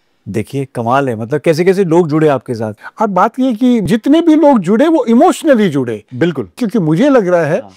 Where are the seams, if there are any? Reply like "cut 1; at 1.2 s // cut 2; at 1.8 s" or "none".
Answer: cut 1; at 2.7 s // cut 2; at 3.9 s // cut 3; at 6.6 s

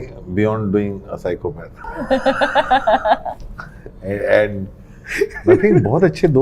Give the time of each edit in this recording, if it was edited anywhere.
none

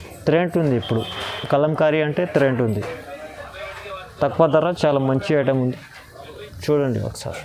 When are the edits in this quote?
none

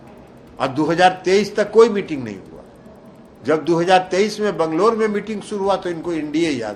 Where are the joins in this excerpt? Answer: none

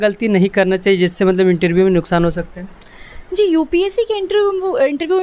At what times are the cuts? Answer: none

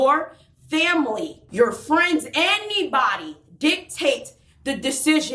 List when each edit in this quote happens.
cut 1; at 1.4 s

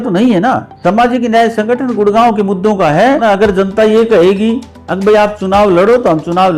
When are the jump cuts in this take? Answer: cut 1; at 3.2 s

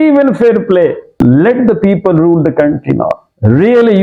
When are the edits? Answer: cut 1; at 1.2 s

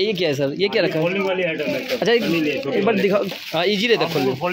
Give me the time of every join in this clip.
cut 1; at 3.3 s

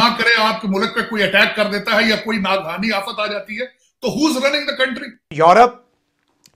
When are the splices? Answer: cut 1; at 5.3 s

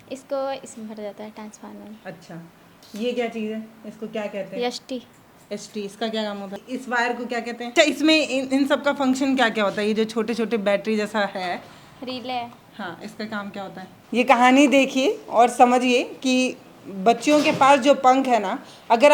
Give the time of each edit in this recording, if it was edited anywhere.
cut 1; at 6.6 s // cut 2; at 7.7 s // cut 3; at 13.9 s

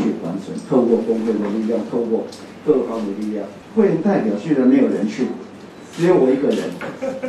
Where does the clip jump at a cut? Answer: cut 1; at 3.6 s

